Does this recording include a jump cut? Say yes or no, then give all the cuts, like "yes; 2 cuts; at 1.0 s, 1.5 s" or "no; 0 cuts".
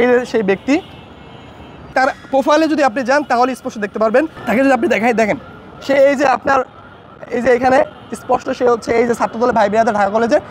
no; 0 cuts